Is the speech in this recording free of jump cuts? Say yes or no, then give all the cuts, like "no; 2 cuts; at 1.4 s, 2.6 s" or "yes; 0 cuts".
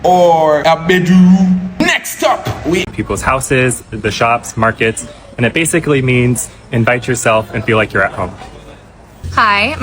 no; 1 cut; at 2.9 s